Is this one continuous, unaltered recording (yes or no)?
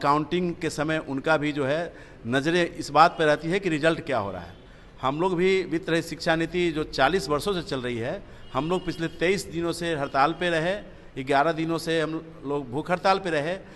yes